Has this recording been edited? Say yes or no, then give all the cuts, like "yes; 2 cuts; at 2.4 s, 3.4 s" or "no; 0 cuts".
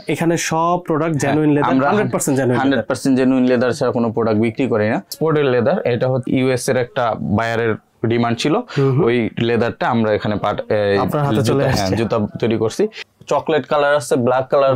yes; 3 cuts; at 5.1 s, 6.2 s, 13.1 s